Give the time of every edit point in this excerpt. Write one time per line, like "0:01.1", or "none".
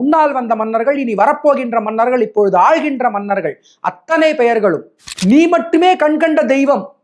0:05.1